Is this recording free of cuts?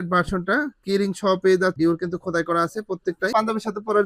no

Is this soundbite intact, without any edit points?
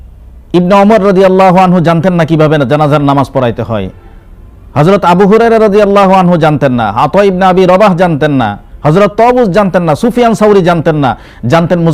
yes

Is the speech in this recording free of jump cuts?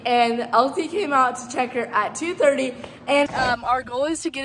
no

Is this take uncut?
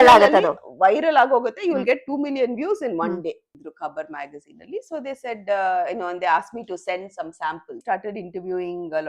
no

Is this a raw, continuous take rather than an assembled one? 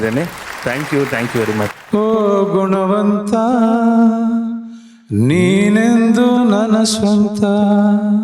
no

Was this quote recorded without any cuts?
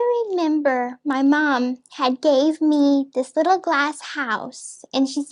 yes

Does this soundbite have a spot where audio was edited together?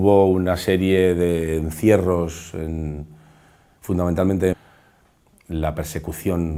no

